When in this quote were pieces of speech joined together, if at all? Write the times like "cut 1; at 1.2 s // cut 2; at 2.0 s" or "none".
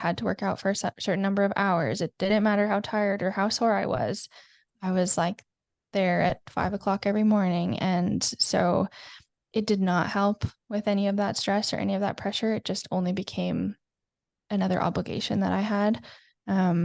none